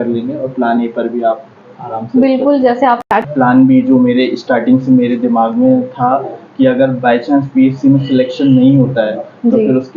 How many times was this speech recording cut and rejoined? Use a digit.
1